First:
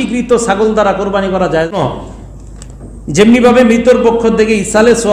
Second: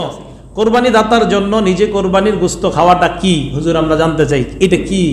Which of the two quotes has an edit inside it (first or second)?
first